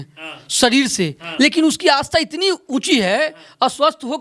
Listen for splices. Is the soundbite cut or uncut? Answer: uncut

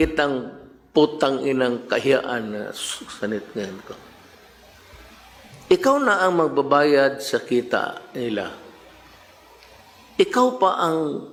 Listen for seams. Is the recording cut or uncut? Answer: uncut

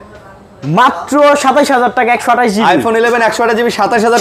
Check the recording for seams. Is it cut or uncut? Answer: uncut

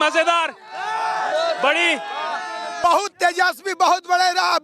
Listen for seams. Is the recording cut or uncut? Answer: cut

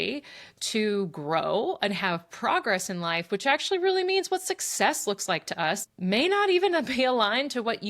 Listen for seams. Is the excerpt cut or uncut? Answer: cut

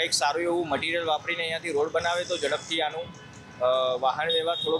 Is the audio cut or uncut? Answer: uncut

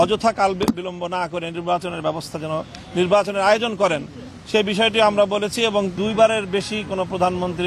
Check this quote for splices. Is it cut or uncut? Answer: cut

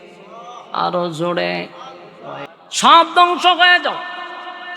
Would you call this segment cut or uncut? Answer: cut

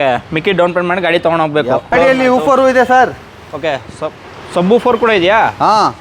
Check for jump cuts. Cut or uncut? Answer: cut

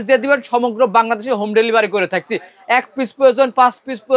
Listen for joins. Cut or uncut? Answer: uncut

